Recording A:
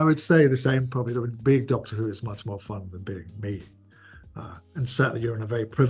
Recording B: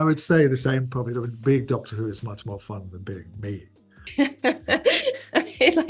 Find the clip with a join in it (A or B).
B